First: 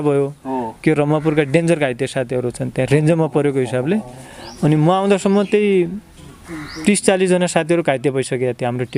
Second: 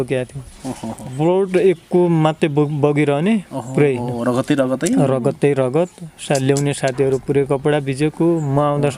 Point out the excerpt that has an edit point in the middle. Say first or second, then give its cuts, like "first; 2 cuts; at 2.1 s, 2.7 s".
second; 1 cut; at 1.0 s